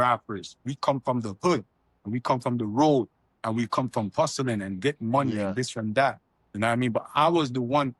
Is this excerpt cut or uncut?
uncut